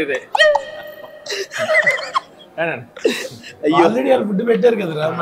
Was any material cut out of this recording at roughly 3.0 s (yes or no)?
no